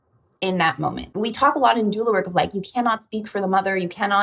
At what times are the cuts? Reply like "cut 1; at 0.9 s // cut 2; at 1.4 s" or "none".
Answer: cut 1; at 1.0 s